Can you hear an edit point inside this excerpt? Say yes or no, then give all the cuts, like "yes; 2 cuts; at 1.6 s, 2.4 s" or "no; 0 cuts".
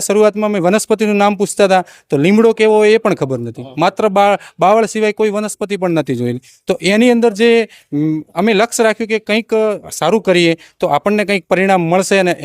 no; 0 cuts